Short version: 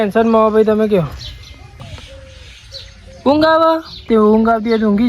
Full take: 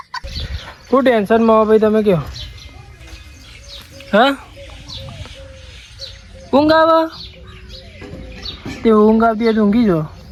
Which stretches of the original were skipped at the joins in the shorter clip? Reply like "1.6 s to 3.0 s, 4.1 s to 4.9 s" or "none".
2.9 s to 5.1 s, 7.2 s to 8.7 s